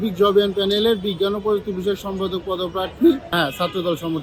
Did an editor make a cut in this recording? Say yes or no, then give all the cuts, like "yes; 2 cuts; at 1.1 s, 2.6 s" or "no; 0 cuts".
no; 0 cuts